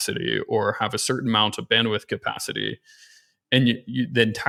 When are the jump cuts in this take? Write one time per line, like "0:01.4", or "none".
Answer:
none